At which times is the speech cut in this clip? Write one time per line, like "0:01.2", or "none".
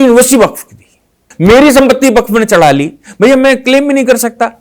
0:01.3